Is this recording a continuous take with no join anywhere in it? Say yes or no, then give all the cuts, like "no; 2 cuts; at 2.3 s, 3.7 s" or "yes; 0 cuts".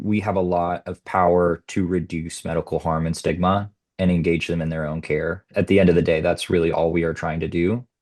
no; 1 cut; at 5.4 s